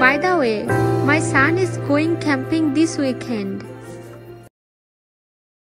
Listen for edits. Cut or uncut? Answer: uncut